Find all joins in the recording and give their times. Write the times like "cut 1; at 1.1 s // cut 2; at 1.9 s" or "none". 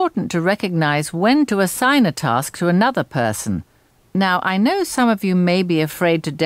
cut 1; at 3.7 s